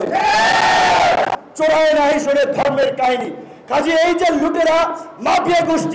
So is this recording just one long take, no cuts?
no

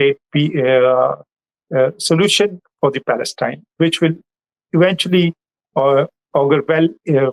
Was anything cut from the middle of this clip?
no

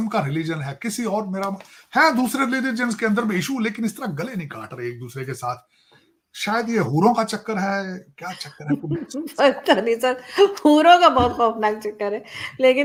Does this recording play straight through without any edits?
yes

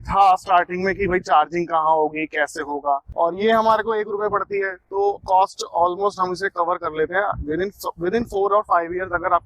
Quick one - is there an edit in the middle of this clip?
yes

